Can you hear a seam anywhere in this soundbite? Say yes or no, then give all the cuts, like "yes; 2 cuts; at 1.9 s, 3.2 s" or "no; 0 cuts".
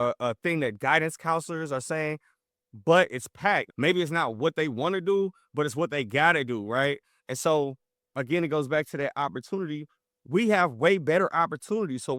yes; 1 cut; at 3.7 s